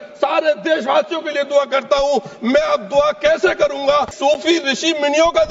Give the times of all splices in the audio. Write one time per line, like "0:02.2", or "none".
0:04.1